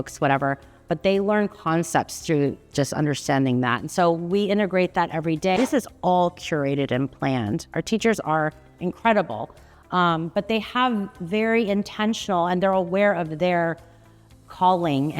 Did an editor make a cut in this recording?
yes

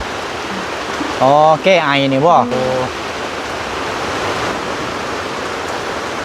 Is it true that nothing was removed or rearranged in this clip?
no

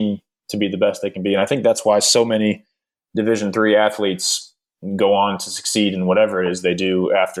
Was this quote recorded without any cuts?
yes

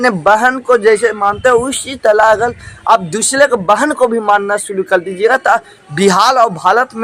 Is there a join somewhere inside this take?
no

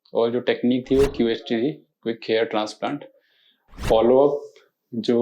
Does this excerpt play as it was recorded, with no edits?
no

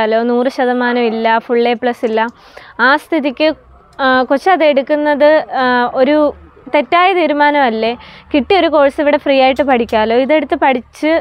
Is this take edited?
no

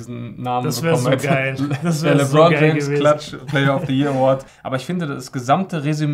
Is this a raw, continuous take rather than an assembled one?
no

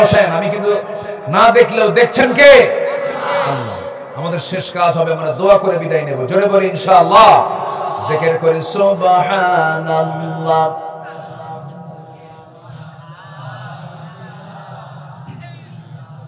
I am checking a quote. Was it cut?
no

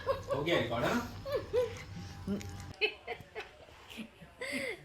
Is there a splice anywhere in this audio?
yes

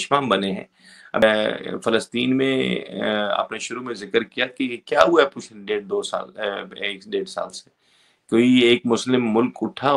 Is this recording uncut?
no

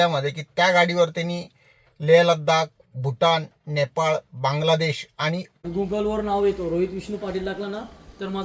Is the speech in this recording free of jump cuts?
no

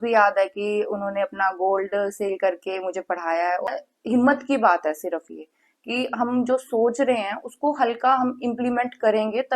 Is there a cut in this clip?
yes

